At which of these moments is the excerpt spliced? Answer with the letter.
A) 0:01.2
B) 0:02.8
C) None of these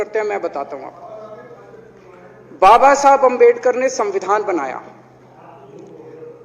C